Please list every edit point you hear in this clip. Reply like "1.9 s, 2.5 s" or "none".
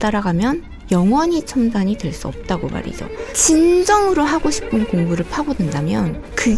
3.3 s